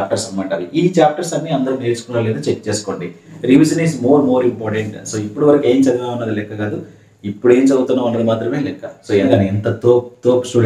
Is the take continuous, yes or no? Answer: no